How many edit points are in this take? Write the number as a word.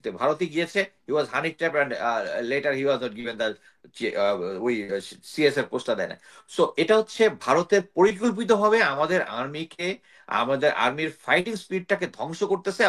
zero